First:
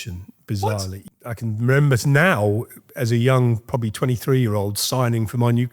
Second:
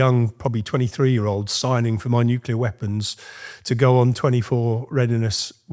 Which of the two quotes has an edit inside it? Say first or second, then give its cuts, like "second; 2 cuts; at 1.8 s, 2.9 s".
first; 1 cut; at 1.0 s